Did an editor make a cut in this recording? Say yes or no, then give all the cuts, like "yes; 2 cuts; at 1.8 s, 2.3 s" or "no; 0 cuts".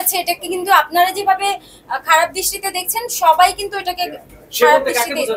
no; 0 cuts